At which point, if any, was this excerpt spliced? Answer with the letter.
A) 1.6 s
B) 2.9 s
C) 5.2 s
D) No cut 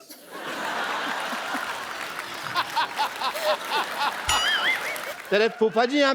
C